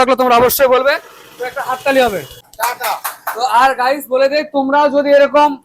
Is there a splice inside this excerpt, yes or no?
no